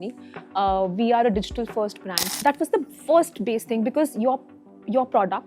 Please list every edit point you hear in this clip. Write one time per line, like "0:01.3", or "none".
0:02.4